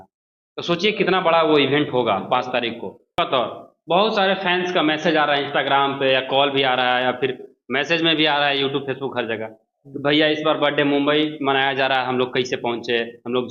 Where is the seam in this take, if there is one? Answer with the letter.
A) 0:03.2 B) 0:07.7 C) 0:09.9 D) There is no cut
A